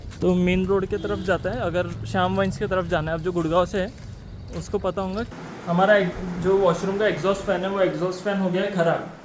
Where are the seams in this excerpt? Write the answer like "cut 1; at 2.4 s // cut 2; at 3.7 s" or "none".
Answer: cut 1; at 5.4 s